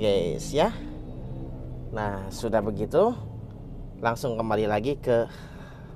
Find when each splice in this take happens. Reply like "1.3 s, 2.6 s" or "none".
none